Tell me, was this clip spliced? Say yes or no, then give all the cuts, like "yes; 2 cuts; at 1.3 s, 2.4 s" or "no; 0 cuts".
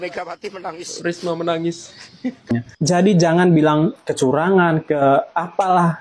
yes; 2 cuts; at 0.9 s, 2.5 s